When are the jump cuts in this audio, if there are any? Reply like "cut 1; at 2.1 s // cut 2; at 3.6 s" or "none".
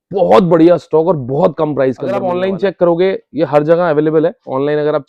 cut 1; at 2.3 s